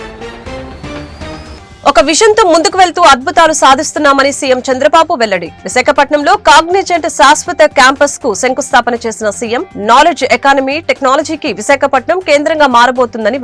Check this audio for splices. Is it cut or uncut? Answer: cut